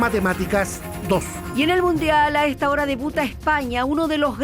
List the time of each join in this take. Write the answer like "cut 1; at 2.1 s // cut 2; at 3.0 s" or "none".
none